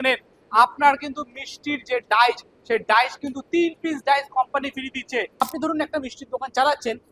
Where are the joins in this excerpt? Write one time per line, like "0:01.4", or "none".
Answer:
0:05.4